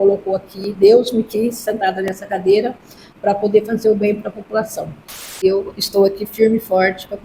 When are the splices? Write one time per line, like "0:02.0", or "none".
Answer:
0:05.4